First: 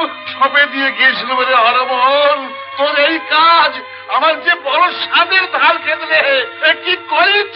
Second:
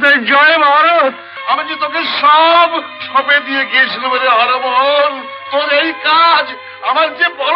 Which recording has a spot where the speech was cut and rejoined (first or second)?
second